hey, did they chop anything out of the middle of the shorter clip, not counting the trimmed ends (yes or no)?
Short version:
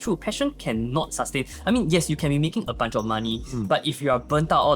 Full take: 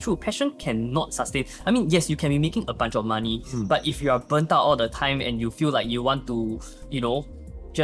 no